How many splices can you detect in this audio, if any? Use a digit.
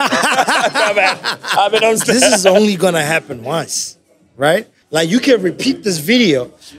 2